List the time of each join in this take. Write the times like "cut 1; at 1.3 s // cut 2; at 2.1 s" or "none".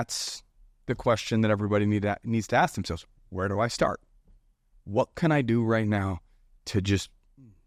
none